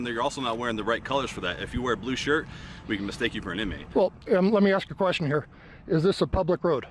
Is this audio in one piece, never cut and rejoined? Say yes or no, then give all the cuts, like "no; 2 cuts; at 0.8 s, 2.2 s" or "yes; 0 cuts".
yes; 0 cuts